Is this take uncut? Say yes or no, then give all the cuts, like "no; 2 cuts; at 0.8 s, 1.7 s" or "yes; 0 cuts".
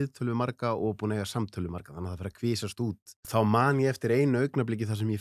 no; 1 cut; at 3.1 s